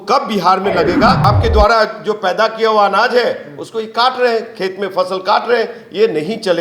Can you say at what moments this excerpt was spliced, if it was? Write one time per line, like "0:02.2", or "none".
0:01.2